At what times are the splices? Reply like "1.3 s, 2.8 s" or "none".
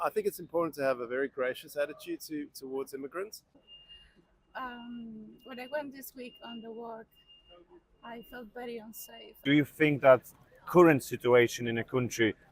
3.6 s, 9.4 s